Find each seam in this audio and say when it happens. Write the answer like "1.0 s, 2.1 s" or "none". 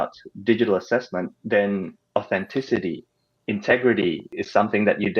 1.4 s, 4.3 s